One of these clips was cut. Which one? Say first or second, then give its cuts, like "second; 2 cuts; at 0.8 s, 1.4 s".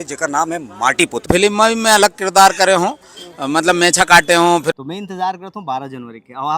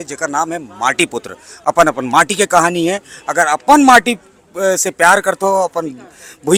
first; 2 cuts; at 1.2 s, 4.8 s